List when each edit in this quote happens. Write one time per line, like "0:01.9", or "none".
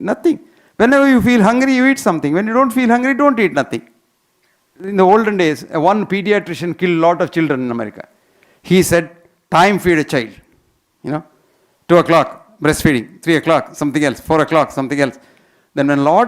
0:04.8